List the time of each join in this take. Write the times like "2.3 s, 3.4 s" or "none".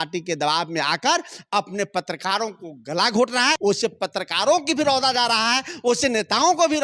3.6 s